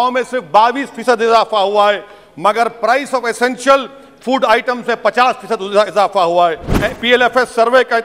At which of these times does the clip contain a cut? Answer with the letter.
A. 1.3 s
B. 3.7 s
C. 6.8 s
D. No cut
C